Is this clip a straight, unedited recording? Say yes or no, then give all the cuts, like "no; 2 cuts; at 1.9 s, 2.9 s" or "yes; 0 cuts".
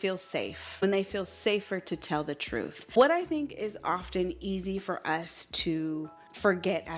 yes; 0 cuts